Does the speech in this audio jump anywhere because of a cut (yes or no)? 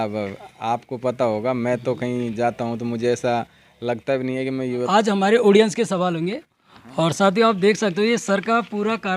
yes